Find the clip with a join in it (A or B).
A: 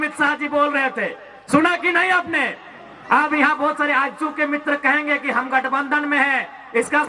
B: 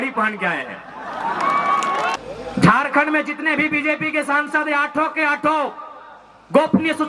B